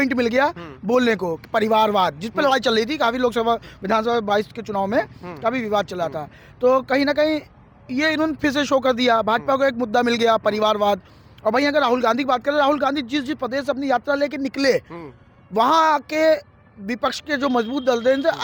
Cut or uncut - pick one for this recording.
uncut